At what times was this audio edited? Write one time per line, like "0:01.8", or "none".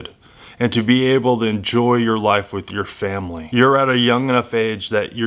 0:03.4